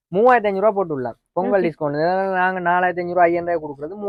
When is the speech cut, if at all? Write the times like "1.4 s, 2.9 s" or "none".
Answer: none